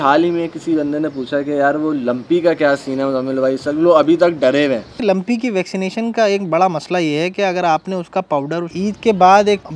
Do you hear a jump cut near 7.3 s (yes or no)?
no